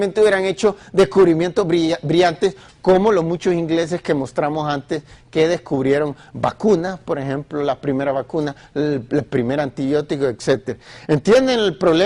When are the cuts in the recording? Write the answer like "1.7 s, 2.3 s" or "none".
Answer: 6.1 s